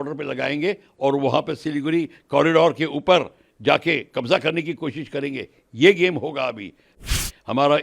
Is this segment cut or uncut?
cut